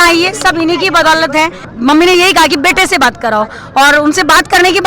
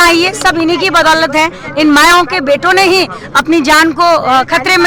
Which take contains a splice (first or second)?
first